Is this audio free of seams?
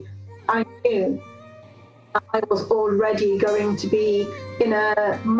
yes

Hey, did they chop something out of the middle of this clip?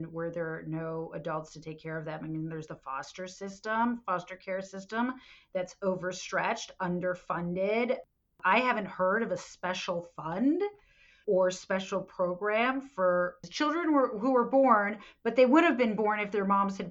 yes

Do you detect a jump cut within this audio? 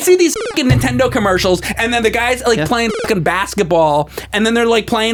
no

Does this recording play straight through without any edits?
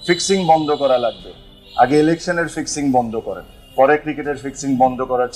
yes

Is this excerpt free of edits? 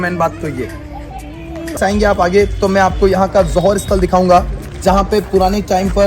no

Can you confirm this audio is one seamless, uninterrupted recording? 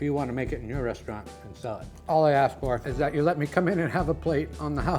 yes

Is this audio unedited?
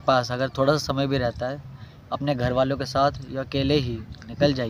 yes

